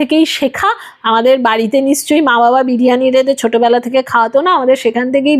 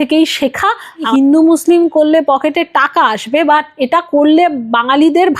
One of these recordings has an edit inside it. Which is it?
second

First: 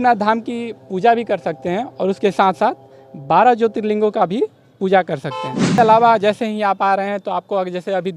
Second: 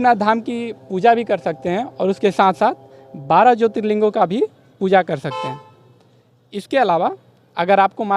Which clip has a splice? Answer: first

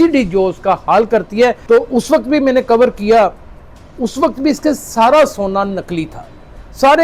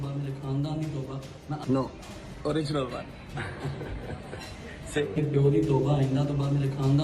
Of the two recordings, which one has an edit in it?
first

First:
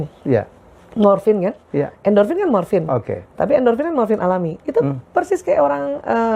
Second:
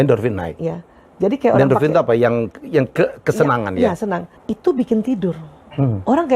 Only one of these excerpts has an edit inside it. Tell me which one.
second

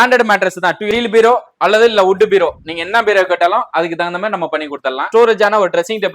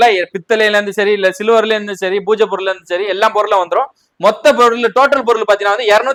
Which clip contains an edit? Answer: first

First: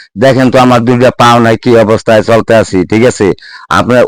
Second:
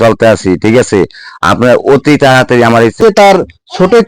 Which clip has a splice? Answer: second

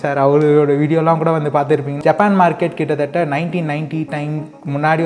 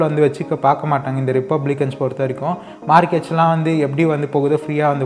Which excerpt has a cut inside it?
first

